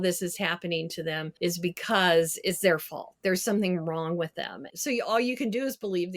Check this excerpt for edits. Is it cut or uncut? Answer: cut